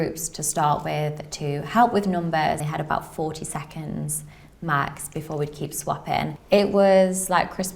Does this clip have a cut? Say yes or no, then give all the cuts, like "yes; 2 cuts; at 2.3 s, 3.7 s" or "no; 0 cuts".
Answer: yes; 2 cuts; at 2.6 s, 6.4 s